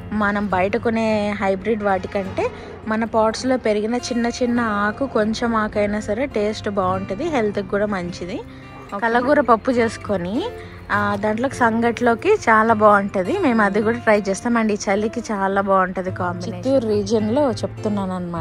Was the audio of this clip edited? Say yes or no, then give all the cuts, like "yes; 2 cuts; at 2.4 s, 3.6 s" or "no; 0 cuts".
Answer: yes; 2 cuts; at 8.8 s, 16.6 s